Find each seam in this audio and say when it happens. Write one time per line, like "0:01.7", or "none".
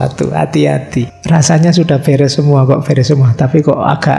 0:01.2